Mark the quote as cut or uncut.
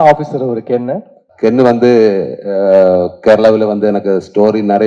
cut